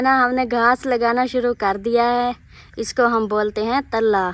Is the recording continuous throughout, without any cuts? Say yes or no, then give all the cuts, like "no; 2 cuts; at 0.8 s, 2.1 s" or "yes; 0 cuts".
yes; 0 cuts